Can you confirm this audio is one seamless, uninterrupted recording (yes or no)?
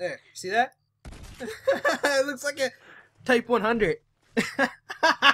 yes